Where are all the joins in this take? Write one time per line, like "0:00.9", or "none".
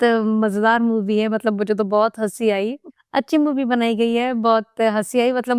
none

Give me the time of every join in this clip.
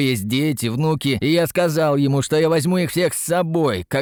none

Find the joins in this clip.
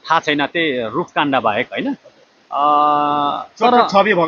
none

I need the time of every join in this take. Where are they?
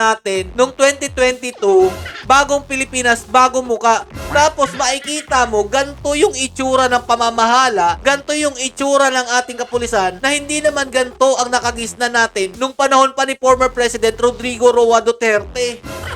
none

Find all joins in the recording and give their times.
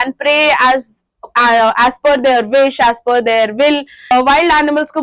0:04.1

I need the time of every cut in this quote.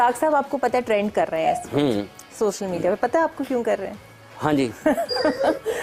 none

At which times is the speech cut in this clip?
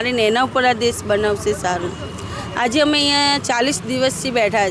none

